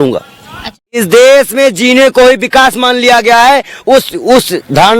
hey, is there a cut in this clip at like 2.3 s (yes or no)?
no